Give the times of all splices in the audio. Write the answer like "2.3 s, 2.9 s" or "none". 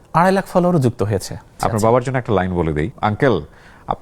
1.6 s, 2.9 s